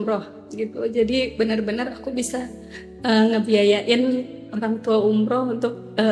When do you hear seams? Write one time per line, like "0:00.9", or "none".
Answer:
none

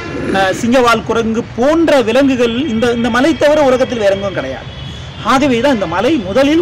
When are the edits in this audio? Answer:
none

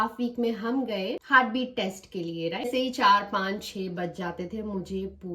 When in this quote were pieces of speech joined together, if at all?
0:01.2
0:02.7

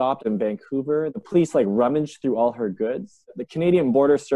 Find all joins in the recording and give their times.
0:03.3

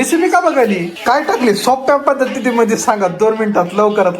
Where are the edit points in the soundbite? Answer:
0:00.9

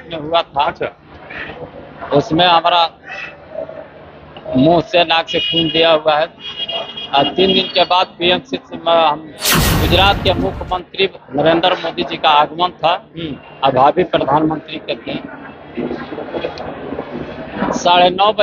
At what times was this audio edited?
0:09.6

